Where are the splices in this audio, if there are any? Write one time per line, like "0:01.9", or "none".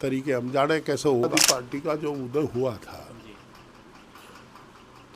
0:01.3